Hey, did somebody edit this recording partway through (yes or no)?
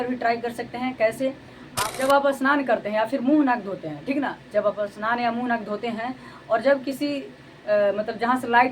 yes